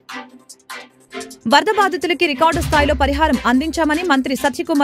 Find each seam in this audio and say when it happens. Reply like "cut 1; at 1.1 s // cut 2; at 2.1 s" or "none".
cut 1; at 1.3 s